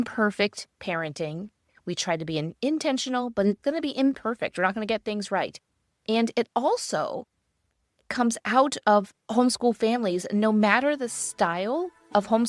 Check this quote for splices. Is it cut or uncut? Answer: uncut